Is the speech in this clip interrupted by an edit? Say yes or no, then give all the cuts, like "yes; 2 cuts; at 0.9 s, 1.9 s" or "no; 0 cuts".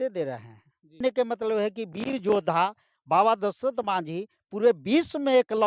yes; 1 cut; at 1.0 s